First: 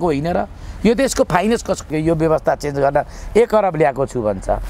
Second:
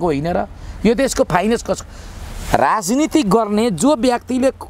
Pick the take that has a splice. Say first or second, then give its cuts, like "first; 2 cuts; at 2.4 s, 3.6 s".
first; 1 cut; at 1.9 s